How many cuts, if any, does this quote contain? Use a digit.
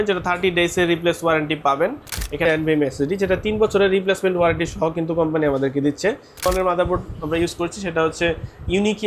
2